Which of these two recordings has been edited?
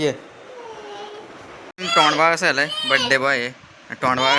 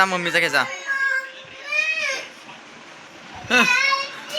first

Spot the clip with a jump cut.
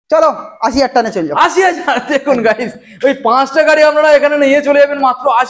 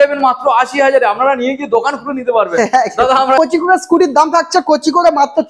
second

